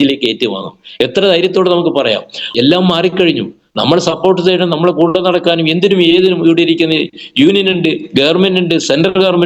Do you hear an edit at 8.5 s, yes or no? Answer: no